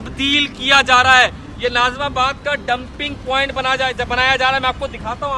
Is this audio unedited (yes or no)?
yes